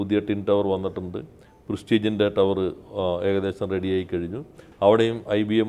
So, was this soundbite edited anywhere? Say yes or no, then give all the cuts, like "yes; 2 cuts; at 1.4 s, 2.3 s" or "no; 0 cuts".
no; 0 cuts